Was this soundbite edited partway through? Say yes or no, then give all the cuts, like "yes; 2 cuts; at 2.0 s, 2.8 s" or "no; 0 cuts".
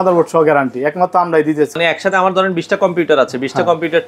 yes; 1 cut; at 1.8 s